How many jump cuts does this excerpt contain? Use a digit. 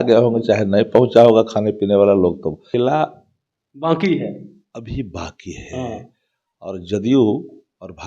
1